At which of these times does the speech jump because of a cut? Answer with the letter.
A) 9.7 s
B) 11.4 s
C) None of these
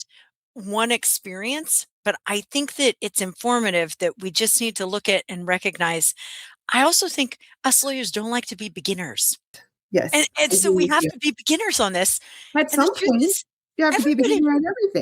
A